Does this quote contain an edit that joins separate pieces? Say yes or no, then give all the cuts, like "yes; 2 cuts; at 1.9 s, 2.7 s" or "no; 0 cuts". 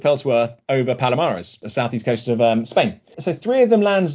no; 0 cuts